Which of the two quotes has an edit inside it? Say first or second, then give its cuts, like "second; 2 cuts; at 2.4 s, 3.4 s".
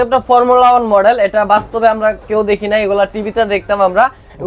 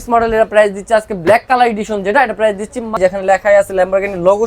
second; 1 cut; at 3.0 s